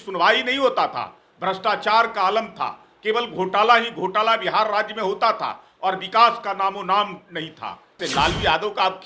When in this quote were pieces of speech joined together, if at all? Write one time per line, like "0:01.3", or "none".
0:08.0